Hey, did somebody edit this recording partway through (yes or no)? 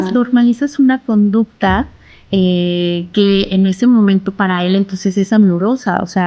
no